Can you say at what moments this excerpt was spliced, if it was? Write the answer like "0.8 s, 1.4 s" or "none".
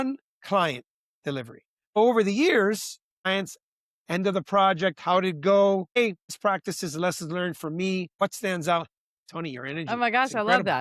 2.0 s, 3.3 s, 6.0 s, 8.1 s